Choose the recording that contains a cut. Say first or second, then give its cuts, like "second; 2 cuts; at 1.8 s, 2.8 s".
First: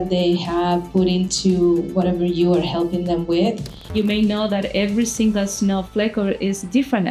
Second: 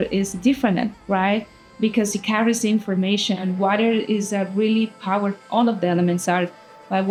first; 1 cut; at 3.9 s